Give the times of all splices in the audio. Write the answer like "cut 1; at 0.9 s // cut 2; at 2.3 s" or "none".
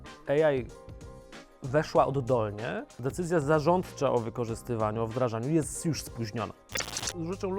cut 1; at 3.0 s // cut 2; at 6.6 s

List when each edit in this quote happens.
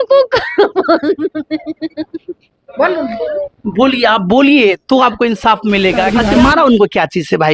cut 1; at 6.1 s

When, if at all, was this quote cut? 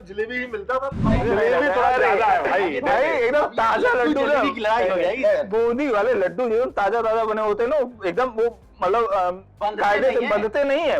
cut 1; at 1.2 s

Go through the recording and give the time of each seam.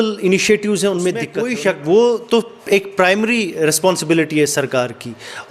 cut 1; at 1.3 s

